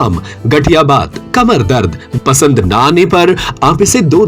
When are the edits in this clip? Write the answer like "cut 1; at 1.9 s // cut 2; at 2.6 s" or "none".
cut 1; at 2.1 s